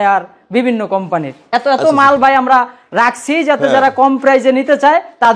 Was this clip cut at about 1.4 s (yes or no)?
yes